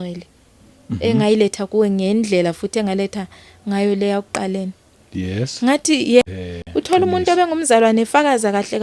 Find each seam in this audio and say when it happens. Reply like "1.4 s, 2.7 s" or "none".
6.2 s